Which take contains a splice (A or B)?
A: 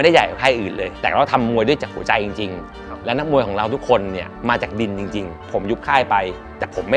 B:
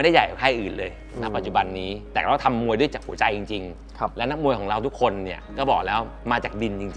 A